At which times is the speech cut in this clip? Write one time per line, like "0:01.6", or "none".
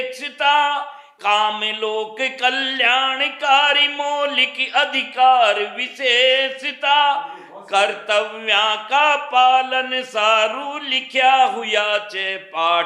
none